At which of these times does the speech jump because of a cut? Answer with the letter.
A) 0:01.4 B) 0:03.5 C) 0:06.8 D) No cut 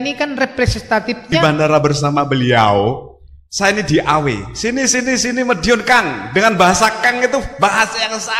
A